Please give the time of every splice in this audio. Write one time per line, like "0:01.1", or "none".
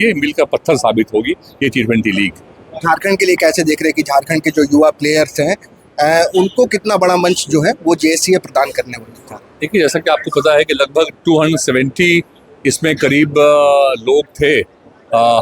none